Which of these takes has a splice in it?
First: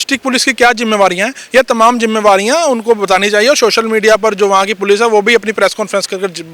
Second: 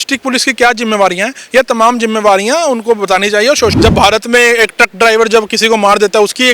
second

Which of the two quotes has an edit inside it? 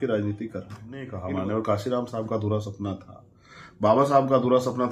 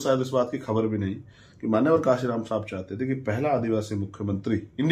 first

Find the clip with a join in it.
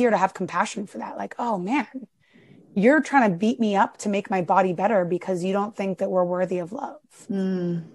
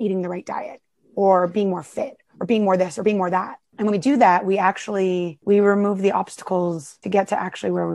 second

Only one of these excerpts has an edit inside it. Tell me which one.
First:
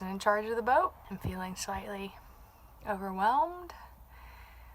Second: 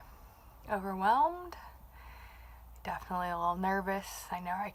first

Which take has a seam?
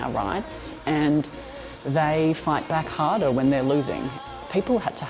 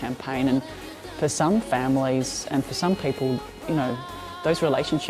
first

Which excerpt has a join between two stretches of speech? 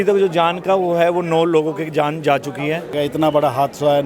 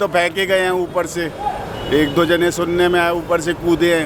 first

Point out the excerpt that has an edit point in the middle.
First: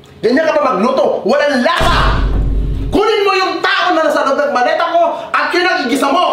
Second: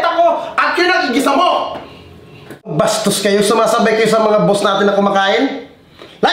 second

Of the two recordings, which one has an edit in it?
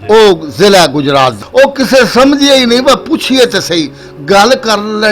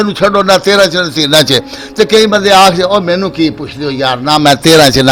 first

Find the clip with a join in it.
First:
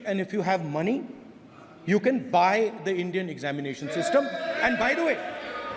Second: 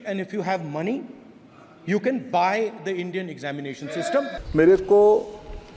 second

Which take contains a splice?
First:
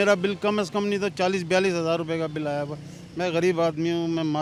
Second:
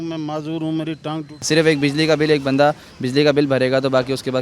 second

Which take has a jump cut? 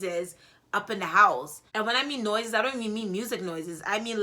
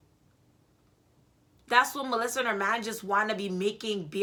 first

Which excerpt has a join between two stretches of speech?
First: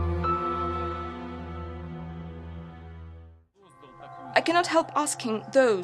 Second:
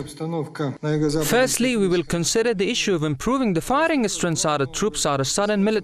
second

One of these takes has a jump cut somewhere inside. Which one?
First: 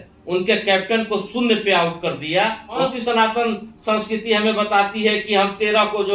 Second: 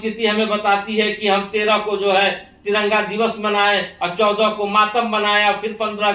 first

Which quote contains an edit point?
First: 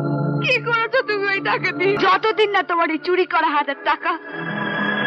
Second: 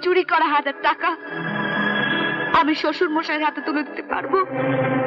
first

